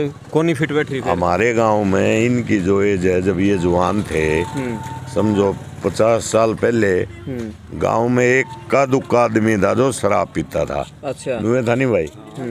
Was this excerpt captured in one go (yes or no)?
yes